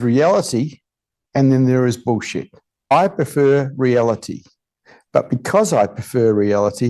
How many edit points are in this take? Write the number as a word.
one